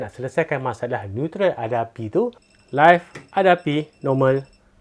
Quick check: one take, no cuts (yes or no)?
no